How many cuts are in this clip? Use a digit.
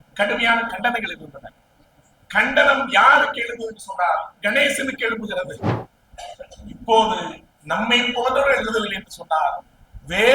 1